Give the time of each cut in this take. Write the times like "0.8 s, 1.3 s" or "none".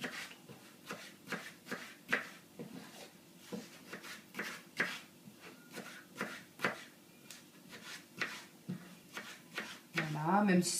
none